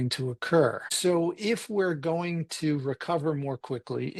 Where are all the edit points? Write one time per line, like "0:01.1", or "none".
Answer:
0:00.9

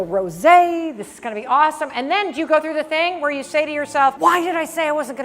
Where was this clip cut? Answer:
0:04.2

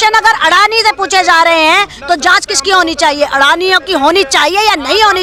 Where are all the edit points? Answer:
none

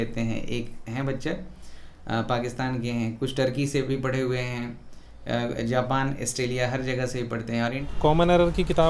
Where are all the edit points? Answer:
0:07.8

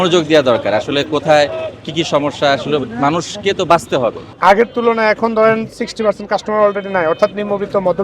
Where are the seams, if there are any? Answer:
0:04.3

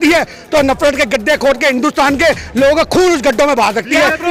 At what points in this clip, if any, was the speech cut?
none

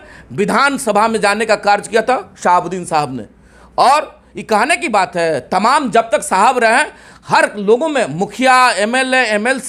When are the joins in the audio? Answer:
none

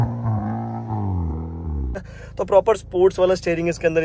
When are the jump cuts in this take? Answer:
0:02.2

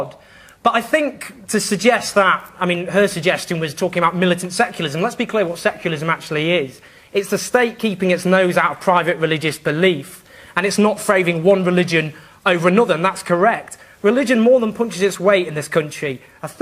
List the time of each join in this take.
0:12.4

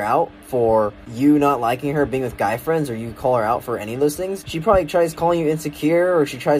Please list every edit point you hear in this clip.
0:01.0
0:04.5

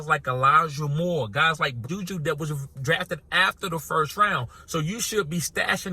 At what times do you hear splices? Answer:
0:01.8

